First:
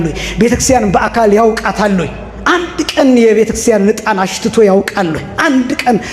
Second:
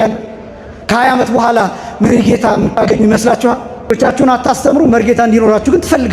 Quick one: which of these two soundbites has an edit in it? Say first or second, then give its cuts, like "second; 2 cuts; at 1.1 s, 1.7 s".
second; 1 cut; at 4.0 s